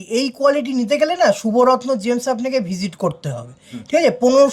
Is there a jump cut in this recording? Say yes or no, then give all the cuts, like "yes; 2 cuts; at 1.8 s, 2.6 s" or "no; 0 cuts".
no; 0 cuts